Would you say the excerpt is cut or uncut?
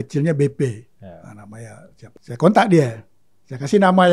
cut